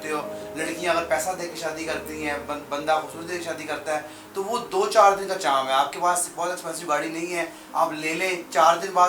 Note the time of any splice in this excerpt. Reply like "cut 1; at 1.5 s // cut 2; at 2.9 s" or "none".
none